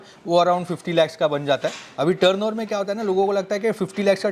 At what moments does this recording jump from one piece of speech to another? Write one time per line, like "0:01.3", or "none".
none